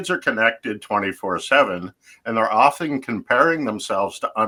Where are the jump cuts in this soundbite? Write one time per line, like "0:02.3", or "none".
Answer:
none